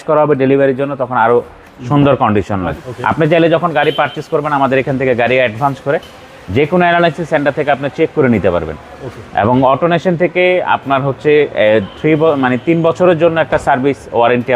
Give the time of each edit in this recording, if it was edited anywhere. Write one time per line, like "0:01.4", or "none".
0:02.8